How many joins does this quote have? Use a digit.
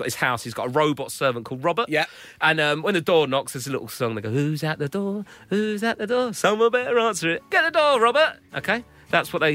0